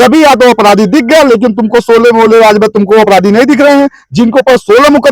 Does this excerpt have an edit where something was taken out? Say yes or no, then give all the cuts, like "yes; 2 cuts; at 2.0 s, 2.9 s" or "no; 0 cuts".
no; 0 cuts